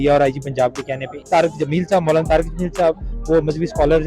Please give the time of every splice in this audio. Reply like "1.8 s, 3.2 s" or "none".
1.1 s